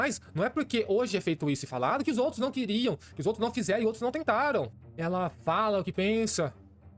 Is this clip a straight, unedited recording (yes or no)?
no